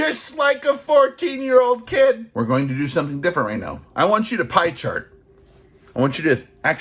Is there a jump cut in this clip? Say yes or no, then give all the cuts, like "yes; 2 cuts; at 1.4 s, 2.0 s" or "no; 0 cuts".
yes; 1 cut; at 2.3 s